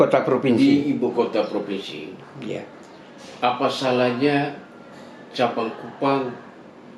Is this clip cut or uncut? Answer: uncut